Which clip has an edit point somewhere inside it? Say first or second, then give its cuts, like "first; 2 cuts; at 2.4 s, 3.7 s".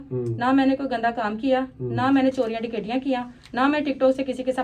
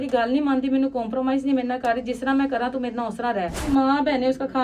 second; 1 cut; at 3.6 s